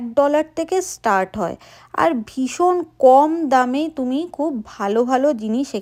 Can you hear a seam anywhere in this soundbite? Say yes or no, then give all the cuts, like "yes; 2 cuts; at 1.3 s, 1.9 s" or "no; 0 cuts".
no; 0 cuts